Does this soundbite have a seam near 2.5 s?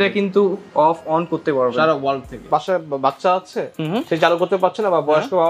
yes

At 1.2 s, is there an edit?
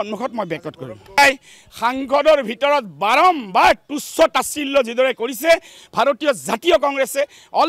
yes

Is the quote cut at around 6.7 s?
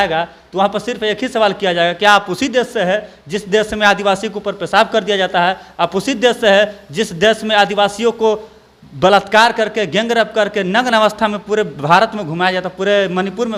no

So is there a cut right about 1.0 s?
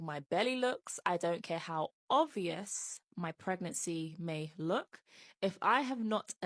no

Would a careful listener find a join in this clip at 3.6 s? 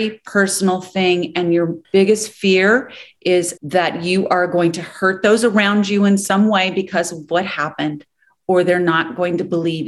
yes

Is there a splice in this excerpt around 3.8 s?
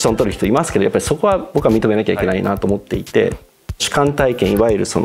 yes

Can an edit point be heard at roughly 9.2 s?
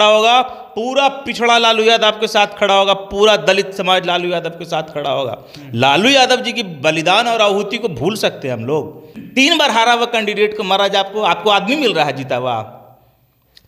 yes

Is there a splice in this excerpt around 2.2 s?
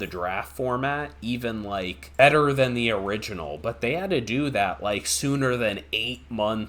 yes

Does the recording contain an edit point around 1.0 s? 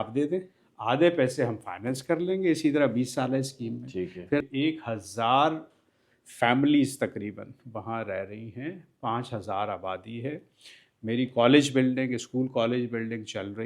no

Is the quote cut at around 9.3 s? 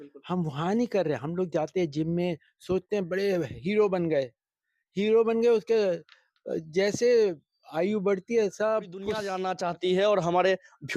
yes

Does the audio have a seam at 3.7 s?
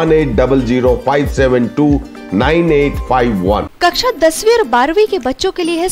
yes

